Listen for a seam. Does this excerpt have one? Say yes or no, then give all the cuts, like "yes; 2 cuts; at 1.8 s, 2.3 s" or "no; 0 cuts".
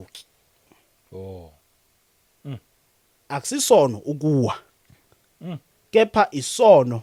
no; 0 cuts